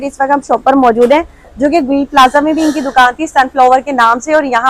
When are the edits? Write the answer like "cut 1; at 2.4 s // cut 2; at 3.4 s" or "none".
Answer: none